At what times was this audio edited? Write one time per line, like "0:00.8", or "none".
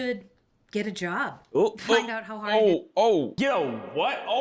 0:03.3